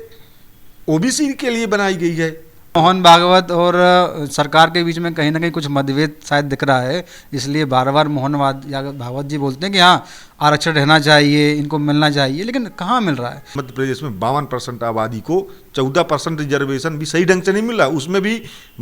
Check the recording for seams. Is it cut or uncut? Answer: cut